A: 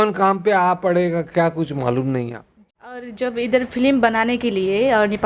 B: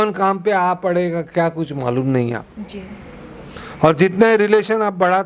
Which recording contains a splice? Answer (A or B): A